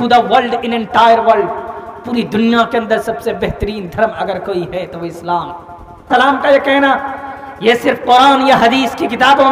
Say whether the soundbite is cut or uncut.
cut